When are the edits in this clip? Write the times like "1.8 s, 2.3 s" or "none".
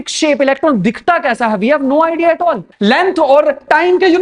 2.7 s